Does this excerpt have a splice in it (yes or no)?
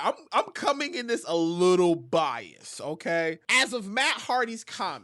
yes